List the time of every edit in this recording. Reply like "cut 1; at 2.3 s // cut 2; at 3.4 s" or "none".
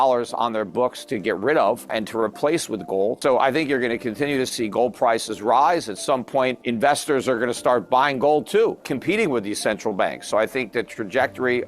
cut 1; at 1.9 s // cut 2; at 3.2 s // cut 3; at 6.6 s // cut 4; at 8.9 s

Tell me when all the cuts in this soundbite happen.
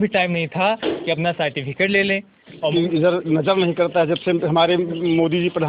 cut 1; at 2.7 s

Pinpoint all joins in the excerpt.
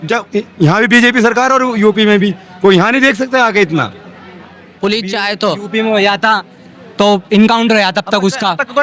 cut 1; at 4.7 s

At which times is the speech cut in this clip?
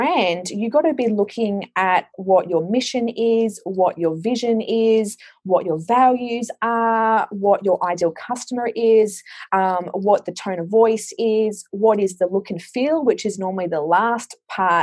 none

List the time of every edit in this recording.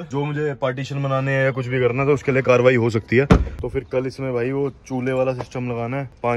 cut 1; at 3.6 s

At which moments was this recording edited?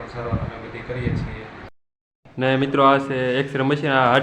cut 1; at 1.7 s

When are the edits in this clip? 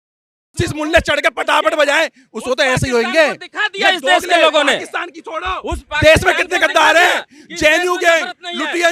none

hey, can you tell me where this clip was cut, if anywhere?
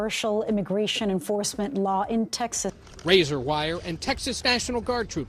cut 1; at 2.7 s

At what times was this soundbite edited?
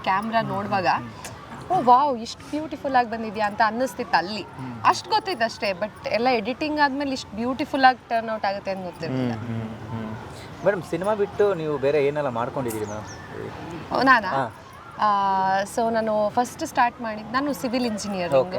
none

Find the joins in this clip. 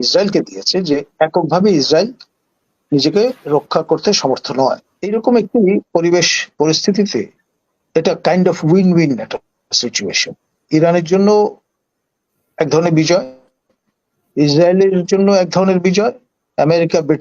cut 1; at 4.9 s

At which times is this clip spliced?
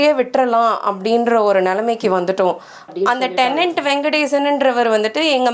cut 1; at 2.9 s

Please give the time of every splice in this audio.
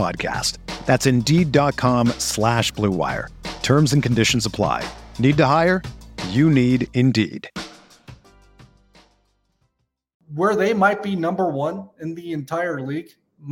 cut 1; at 10.2 s

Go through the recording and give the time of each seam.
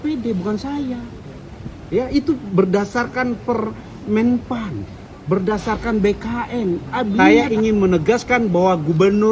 cut 1; at 7.3 s

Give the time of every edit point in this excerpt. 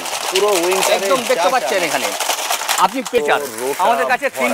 cut 1; at 3.2 s

